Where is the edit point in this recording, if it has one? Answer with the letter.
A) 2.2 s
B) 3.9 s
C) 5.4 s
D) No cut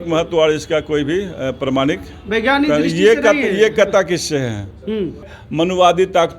C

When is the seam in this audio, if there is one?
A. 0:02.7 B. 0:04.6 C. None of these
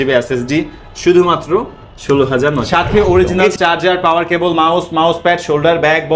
A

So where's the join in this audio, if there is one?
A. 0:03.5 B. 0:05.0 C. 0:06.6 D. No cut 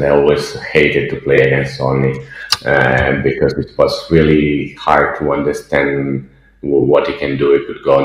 D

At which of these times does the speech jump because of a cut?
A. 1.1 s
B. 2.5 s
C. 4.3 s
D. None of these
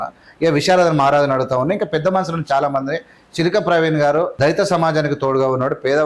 C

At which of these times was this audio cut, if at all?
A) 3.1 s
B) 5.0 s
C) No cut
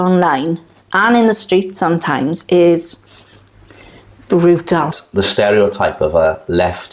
B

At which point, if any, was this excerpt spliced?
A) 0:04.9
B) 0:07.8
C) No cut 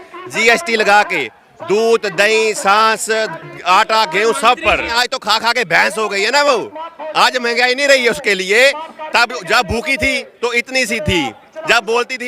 A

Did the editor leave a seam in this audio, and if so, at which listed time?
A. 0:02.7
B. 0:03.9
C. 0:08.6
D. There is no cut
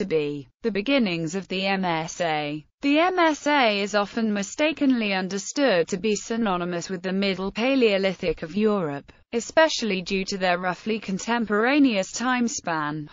C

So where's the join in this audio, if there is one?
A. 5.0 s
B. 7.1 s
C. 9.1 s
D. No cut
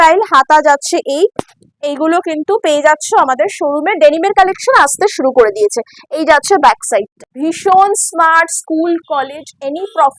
B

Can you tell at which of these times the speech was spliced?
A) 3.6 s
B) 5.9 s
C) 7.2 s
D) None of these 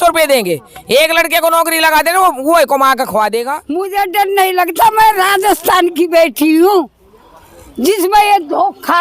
A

